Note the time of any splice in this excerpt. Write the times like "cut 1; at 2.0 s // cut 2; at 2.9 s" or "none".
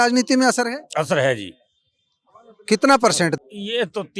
none